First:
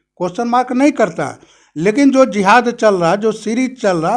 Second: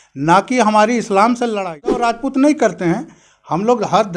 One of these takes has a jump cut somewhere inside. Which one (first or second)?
second